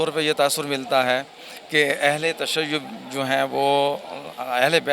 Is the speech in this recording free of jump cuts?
yes; 0 cuts

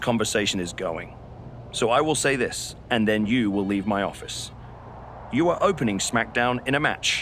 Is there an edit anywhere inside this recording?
no; 0 cuts

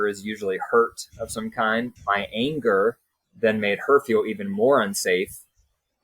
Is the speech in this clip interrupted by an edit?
yes; 1 cut; at 2.0 s

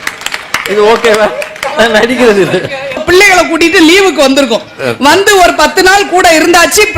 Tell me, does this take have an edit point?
yes; 1 cut; at 3.0 s

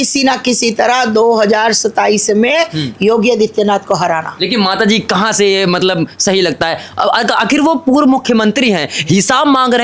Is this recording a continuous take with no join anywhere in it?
yes; 0 cuts

